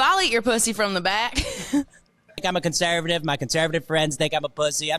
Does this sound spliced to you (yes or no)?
yes